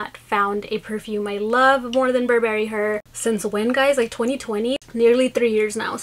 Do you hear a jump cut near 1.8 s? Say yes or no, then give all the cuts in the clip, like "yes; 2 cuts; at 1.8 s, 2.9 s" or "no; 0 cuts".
no; 2 cuts; at 3.1 s, 4.8 s